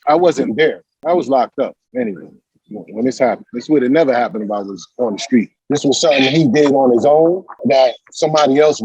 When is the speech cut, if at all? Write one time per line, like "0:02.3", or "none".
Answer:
0:05.5